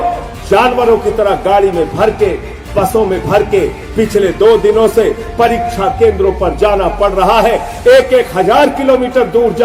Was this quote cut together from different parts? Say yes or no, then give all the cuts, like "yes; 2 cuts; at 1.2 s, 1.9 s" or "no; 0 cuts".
no; 0 cuts